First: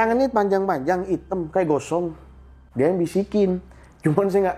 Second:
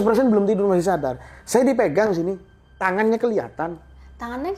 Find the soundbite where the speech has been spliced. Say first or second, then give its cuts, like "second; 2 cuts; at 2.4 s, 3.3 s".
first; 1 cut; at 2.6 s